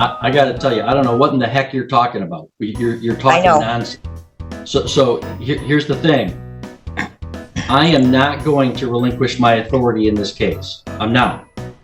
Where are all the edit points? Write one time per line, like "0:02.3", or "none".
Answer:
none